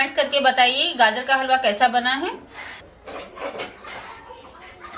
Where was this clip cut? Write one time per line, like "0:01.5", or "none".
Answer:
0:02.9